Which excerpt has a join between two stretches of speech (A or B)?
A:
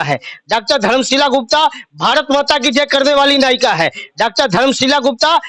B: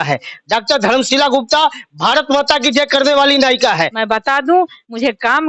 B